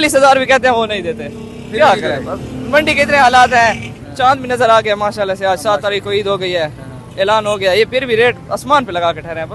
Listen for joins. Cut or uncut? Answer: uncut